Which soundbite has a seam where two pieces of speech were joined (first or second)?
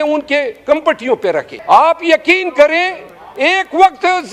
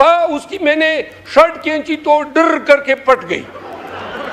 first